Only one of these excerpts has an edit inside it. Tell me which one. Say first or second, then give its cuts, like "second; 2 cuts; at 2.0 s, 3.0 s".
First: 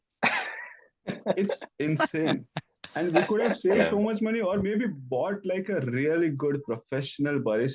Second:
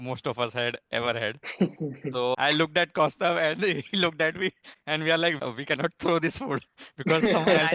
second; 2 cuts; at 2.3 s, 5.4 s